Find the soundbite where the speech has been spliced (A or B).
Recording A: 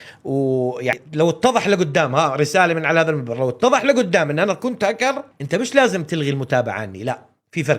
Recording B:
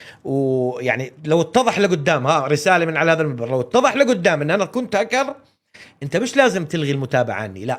A